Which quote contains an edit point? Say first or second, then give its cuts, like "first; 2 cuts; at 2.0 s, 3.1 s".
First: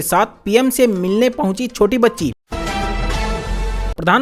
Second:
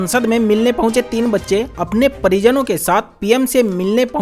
first; 1 cut; at 2.4 s